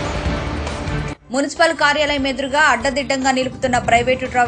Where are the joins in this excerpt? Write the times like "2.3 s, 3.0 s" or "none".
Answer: 1.1 s